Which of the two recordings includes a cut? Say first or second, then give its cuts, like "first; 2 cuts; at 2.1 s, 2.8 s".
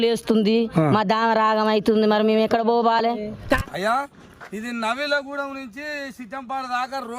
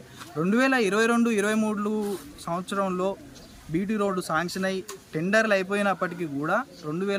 first; 1 cut; at 3.6 s